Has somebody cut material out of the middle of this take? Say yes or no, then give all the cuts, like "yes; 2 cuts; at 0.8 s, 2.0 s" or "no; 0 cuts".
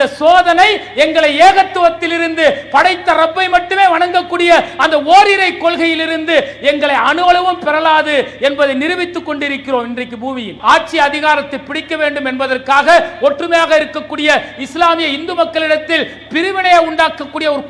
yes; 1 cut; at 10.5 s